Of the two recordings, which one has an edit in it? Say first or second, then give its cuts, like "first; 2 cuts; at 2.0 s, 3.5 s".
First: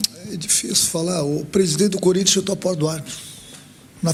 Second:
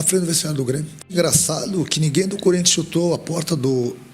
second; 1 cut; at 1.0 s